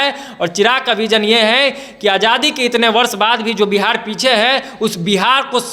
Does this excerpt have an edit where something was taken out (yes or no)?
no